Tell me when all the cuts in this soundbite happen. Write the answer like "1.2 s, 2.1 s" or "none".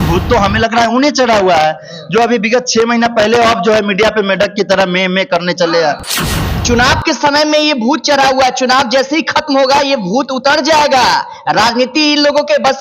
6.1 s